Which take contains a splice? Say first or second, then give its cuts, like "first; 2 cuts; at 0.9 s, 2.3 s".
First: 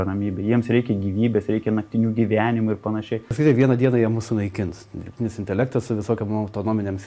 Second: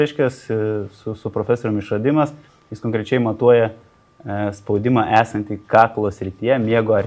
first; 1 cut; at 3.3 s